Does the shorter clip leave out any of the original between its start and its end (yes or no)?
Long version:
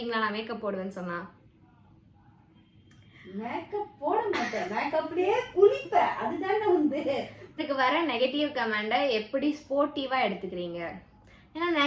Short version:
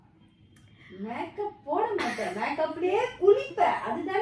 no